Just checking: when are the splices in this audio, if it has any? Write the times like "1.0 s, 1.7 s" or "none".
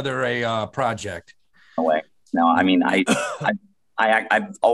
none